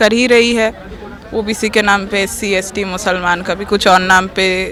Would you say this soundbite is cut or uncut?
uncut